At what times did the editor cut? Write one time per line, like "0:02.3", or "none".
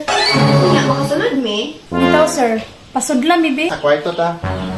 0:03.7